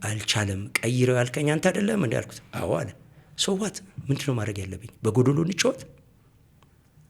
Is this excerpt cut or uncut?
uncut